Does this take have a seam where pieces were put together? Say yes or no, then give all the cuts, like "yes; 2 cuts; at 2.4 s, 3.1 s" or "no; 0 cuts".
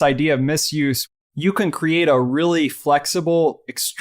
yes; 1 cut; at 1.1 s